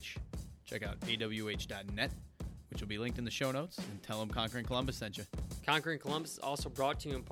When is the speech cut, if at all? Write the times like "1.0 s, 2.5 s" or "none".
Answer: 5.5 s